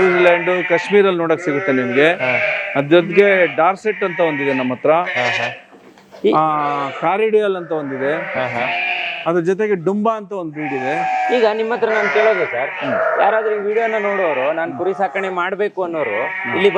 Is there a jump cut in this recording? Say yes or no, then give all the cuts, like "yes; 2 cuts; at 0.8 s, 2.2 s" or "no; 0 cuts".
no; 0 cuts